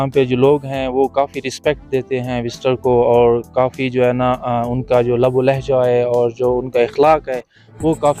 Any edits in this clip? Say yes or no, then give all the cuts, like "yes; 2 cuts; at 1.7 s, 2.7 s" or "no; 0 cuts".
no; 0 cuts